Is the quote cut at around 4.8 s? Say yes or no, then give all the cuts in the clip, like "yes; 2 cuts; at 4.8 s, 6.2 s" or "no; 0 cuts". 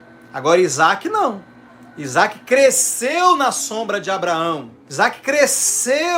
yes; 1 cut; at 4.8 s